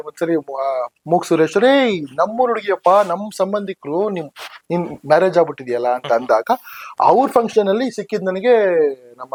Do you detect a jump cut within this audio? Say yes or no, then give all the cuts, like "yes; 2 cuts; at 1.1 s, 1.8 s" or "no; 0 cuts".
no; 0 cuts